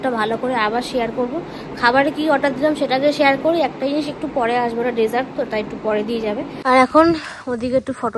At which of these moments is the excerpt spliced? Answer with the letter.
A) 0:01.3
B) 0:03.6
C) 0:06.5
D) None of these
C